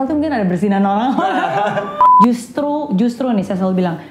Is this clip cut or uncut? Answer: cut